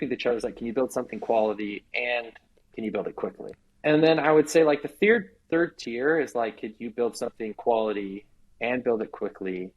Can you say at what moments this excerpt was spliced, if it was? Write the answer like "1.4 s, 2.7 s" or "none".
3.6 s